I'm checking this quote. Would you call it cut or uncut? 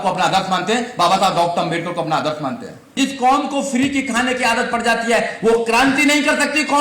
cut